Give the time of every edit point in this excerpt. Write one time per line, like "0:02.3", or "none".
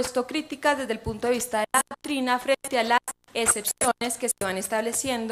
none